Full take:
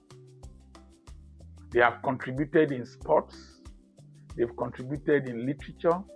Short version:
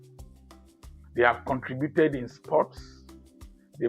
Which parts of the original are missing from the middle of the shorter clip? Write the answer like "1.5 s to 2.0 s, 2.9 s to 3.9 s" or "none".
1.4 s to 1.7 s

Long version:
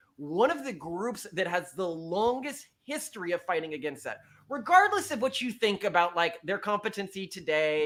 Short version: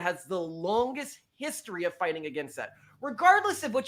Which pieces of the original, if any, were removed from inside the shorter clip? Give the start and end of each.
none

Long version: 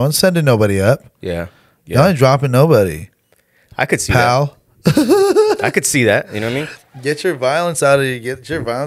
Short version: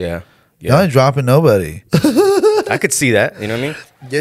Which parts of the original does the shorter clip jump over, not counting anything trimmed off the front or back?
3.0 s to 4.7 s

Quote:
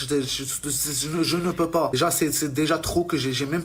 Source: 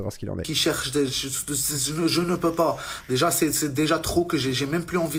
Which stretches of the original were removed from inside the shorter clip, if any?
2.8 s to 3.1 s

